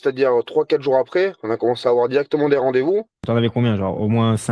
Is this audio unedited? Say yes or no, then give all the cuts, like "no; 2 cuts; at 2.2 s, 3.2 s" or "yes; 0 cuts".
no; 1 cut; at 3.2 s